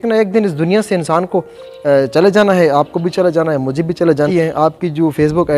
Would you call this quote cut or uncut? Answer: cut